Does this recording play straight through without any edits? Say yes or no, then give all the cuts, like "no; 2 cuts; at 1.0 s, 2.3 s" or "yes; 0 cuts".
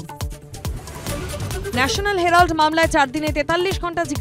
no; 1 cut; at 1.7 s